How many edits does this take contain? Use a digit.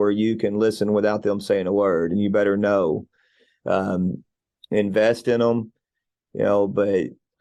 0